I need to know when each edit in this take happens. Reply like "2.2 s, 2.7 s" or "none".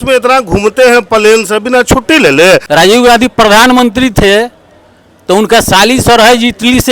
2.7 s